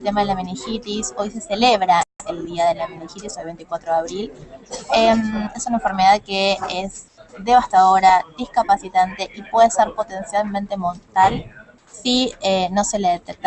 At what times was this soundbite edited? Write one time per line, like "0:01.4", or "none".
none